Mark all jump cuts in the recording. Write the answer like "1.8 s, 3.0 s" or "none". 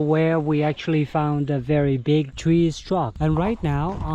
2.3 s, 3.1 s